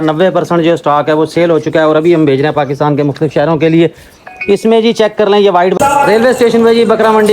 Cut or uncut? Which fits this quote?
cut